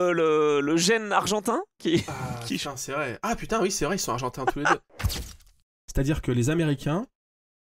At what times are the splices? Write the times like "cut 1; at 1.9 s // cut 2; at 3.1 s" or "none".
cut 1; at 5.2 s